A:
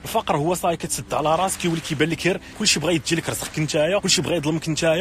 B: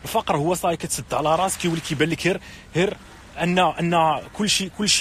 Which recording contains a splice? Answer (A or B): A